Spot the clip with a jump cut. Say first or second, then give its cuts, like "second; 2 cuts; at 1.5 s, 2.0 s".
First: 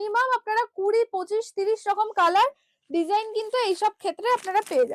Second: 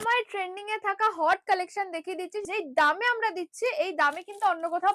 second; 1 cut; at 2.5 s